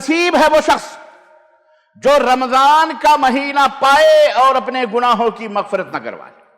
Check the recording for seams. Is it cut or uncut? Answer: uncut